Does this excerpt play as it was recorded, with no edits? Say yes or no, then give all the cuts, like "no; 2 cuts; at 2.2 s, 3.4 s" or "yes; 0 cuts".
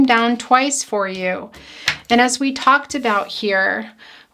yes; 0 cuts